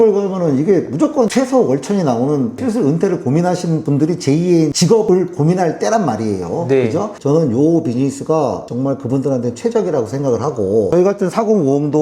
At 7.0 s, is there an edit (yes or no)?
no